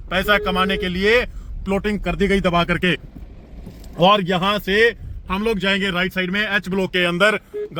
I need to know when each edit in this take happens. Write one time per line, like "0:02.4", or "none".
none

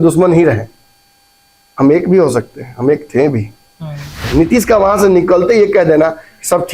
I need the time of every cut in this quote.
0:04.2

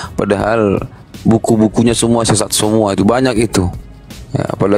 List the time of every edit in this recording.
none

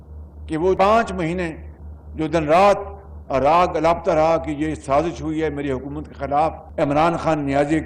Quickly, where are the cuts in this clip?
0:06.6

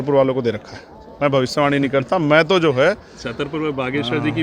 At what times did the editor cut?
none

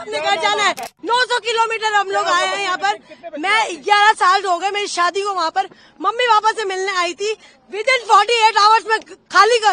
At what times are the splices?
0:00.9

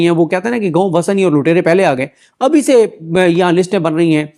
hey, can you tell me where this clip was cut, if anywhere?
none

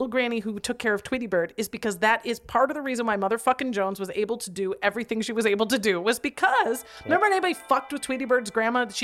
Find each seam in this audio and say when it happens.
0:06.9

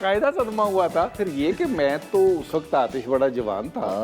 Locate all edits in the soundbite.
0:01.2

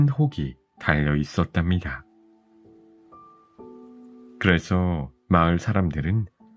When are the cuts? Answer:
none

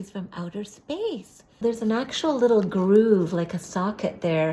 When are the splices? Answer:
0:01.6

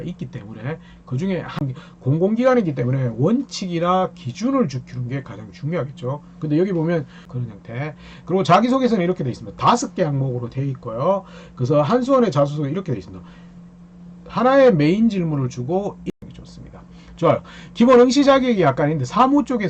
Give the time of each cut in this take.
0:01.6
0:07.2
0:16.0

